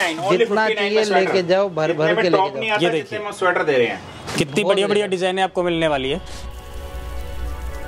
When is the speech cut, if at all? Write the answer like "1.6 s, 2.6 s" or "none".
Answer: 6.4 s